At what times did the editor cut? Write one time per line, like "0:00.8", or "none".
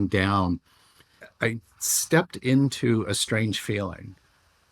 0:01.2